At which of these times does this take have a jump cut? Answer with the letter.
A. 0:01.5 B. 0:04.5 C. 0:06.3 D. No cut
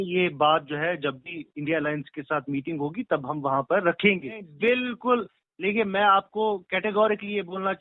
B